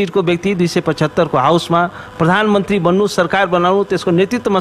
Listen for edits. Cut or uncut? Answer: uncut